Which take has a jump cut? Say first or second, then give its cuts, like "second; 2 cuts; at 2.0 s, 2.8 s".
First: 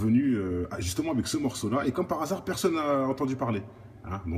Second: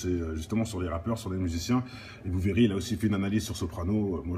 second; 1 cut; at 2.6 s